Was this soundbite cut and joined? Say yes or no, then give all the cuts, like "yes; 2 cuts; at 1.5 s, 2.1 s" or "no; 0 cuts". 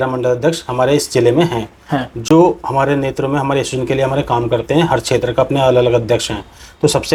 no; 0 cuts